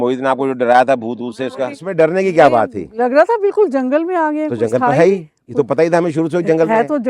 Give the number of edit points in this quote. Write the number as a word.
one